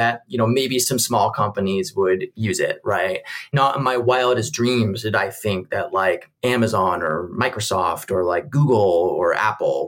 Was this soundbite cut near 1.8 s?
no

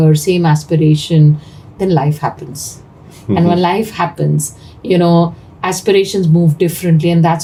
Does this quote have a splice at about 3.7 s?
no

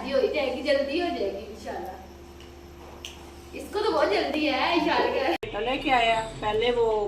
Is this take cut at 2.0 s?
no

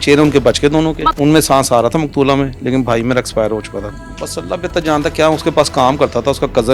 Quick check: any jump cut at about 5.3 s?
no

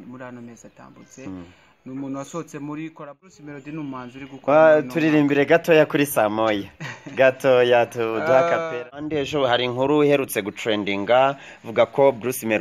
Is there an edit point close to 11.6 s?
no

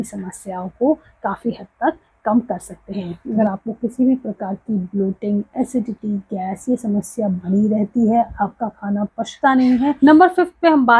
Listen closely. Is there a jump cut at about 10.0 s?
yes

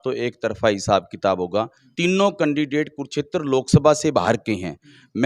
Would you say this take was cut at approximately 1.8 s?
yes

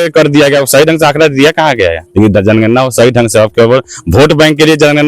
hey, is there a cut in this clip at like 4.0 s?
no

